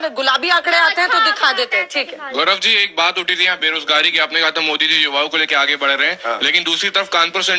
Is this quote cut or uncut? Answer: uncut